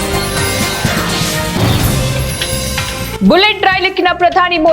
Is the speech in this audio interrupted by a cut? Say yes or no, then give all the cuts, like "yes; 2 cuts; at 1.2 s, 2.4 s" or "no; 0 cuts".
no; 0 cuts